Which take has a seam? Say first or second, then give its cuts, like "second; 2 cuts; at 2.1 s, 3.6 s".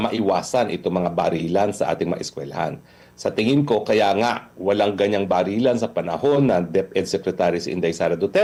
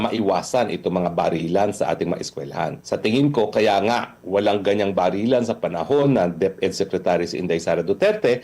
second; 1 cut; at 2.8 s